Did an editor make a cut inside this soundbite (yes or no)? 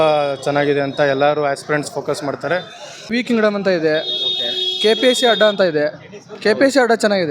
yes